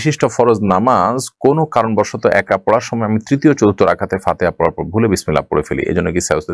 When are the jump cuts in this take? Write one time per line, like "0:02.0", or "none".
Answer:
none